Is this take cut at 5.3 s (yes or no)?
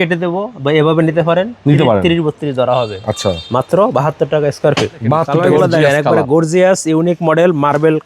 yes